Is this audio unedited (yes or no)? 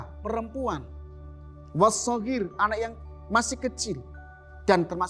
yes